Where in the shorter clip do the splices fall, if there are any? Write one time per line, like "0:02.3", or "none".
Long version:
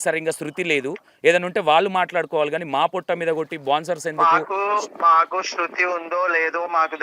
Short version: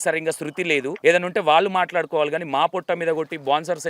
0:00.9